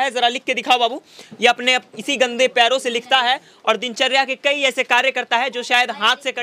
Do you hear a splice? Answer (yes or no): no